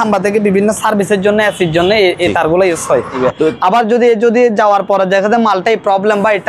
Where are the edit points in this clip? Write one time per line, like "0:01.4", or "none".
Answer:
0:03.2